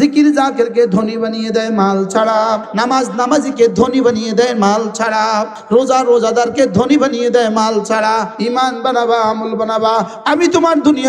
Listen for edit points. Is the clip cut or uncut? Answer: cut